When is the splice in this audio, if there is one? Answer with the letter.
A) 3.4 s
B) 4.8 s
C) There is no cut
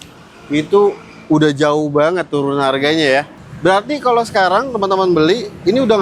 A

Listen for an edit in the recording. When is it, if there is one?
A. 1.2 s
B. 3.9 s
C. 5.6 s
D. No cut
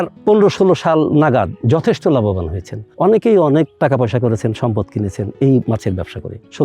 C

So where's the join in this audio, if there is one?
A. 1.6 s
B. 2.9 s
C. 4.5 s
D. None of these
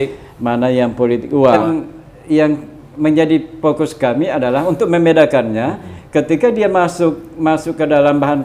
A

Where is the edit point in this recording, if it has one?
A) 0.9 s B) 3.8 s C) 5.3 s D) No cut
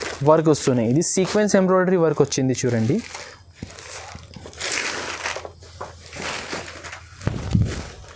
D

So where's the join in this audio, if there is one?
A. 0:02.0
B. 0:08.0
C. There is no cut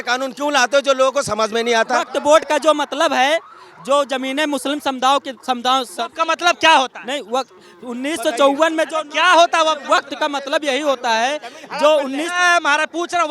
A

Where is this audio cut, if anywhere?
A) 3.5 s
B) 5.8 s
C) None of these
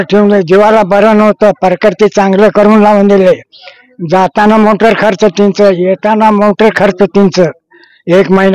C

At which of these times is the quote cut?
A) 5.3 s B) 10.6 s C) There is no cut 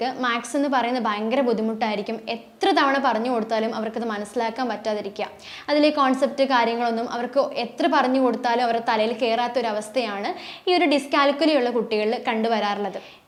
C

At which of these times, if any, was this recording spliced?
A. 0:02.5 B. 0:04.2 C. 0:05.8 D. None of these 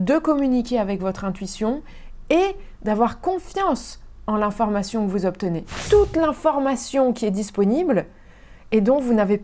C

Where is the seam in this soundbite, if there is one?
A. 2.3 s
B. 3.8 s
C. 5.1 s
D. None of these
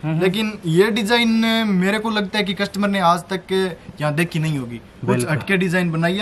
D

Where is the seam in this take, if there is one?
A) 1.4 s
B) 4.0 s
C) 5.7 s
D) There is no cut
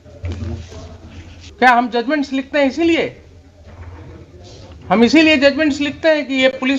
A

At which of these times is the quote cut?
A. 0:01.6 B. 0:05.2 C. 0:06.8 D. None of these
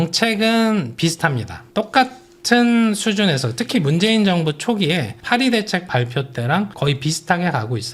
D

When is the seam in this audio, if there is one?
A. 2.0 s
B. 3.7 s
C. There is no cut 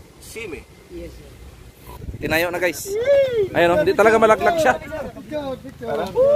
A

